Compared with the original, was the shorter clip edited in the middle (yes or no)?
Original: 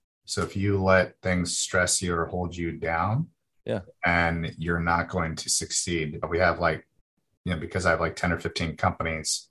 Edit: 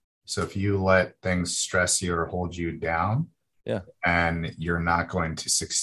no